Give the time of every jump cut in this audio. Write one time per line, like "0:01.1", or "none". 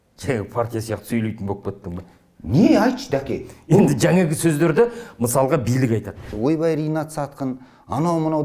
0:06.3